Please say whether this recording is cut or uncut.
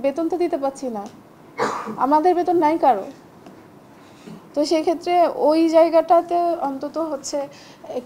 uncut